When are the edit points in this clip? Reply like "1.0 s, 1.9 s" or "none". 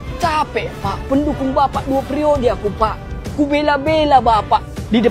none